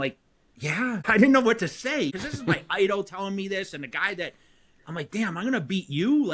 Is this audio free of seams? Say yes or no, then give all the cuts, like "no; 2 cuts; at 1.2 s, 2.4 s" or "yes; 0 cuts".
no; 2 cuts; at 1.0 s, 2.1 s